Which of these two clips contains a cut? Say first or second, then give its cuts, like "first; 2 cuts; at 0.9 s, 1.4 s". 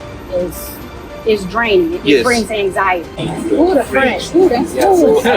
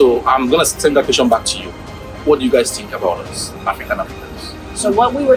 first; 1 cut; at 3.2 s